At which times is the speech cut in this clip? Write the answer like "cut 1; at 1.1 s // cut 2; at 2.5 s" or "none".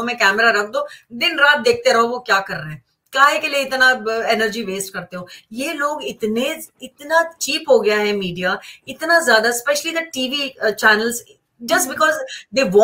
none